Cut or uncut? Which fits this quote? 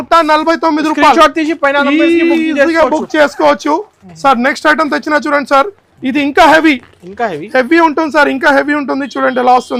uncut